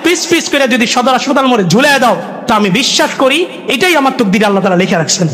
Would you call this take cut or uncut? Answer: uncut